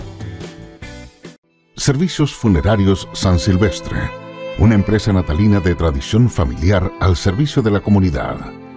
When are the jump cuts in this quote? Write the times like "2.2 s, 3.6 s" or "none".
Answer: 1.4 s